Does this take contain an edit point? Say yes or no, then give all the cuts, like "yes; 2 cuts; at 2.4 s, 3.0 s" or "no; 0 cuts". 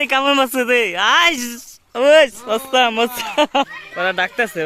yes; 1 cut; at 3.7 s